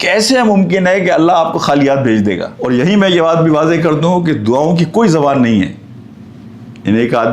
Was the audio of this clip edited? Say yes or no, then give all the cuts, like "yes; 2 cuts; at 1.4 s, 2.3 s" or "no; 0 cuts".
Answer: yes; 1 cut; at 2.5 s